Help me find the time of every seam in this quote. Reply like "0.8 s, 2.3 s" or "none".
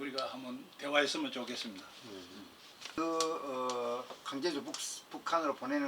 3.0 s